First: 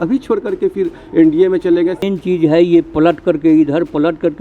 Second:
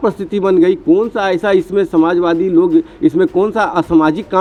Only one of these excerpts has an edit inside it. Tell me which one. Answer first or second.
first